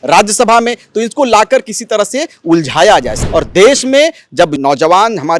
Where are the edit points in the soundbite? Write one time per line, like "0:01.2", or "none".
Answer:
0:03.2
0:04.6

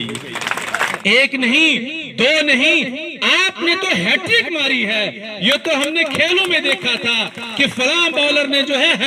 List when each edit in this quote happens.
0:00.9

